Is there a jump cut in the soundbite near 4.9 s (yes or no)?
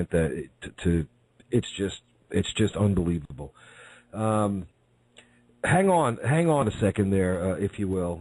no